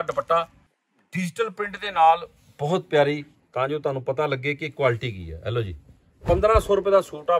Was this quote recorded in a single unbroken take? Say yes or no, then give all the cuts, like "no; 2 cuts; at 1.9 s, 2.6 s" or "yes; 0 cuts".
no; 1 cut; at 3.4 s